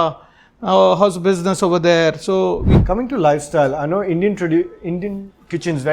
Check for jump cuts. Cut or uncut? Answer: cut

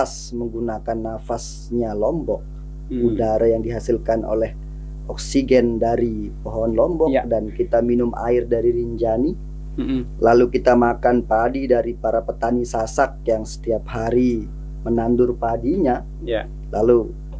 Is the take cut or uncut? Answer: uncut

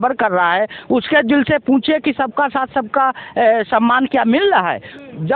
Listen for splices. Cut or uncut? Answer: uncut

